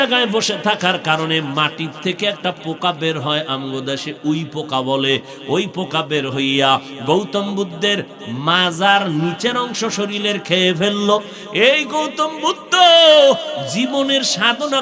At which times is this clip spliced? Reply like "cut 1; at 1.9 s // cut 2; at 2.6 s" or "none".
none